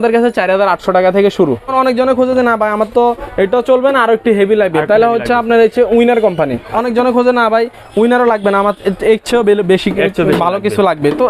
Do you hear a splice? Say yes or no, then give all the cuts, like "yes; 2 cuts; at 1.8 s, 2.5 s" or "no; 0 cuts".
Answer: yes; 2 cuts; at 1.7 s, 6.7 s